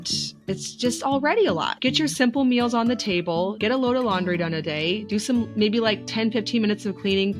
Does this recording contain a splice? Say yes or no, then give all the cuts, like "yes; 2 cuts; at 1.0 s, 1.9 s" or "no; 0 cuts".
yes; 2 cuts; at 1.7 s, 3.5 s